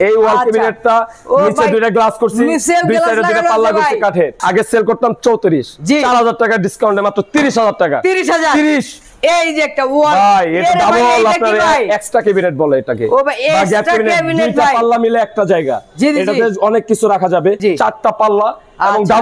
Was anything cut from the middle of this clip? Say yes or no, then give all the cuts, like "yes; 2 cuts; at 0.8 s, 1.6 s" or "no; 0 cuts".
no; 0 cuts